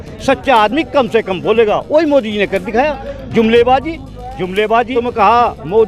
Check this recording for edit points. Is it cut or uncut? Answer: cut